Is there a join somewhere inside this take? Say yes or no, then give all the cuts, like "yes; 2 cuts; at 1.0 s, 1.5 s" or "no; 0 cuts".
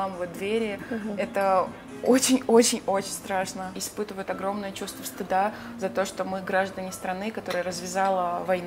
yes; 1 cut; at 3.7 s